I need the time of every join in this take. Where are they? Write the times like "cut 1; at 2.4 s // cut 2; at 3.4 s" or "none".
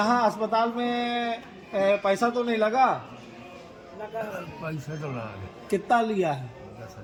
none